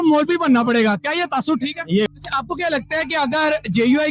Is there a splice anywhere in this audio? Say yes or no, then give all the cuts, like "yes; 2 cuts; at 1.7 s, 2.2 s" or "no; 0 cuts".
yes; 1 cut; at 2.1 s